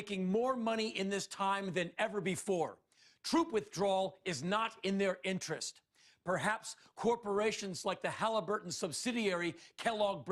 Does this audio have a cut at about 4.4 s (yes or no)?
yes